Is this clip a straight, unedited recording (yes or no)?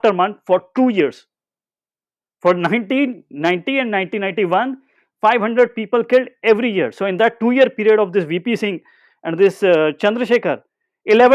yes